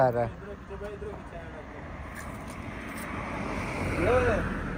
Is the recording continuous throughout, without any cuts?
yes; 0 cuts

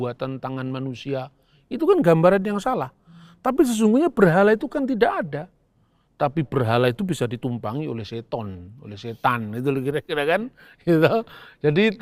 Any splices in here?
no; 0 cuts

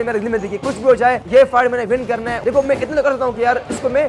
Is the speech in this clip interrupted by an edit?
yes; 2 cuts; at 1.2 s, 2.3 s

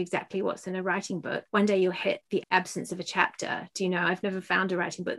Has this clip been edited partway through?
yes; 2 cuts; at 1.4 s, 2.4 s

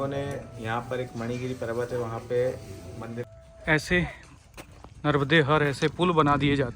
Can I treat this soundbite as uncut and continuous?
no; 1 cut; at 3.2 s

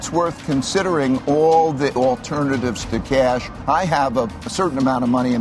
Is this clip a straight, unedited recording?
no; 3 cuts; at 2.0 s, 3.5 s, 4.5 s

